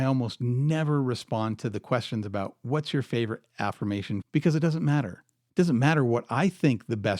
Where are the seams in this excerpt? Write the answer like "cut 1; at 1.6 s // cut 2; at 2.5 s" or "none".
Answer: cut 1; at 2.2 s // cut 2; at 4.2 s